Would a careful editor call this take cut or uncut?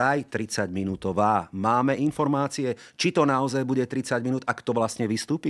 uncut